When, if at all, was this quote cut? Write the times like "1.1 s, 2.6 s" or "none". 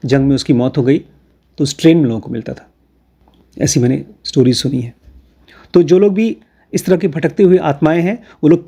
none